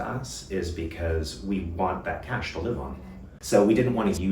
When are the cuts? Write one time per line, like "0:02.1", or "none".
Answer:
0:03.3